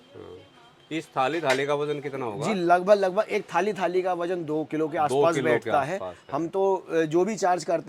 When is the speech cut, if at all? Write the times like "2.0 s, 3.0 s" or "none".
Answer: none